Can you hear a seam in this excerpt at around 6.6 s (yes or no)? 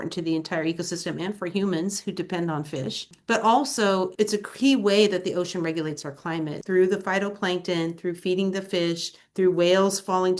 yes